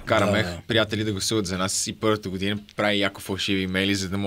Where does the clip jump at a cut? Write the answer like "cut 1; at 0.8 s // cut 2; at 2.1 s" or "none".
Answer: none

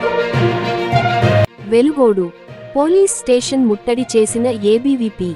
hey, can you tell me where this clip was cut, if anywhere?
cut 1; at 1.5 s

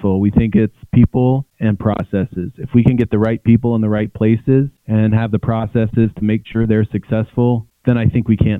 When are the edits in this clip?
cut 1; at 1.5 s // cut 2; at 4.8 s // cut 3; at 7.7 s

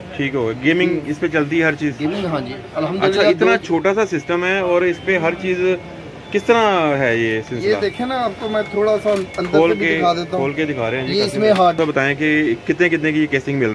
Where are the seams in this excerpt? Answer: cut 1; at 11.8 s

